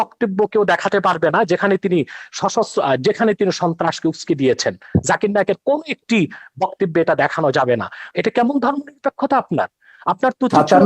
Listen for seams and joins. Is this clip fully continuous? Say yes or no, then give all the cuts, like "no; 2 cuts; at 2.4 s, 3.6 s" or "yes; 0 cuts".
no; 1 cut; at 8.1 s